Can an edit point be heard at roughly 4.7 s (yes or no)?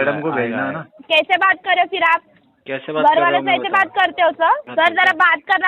yes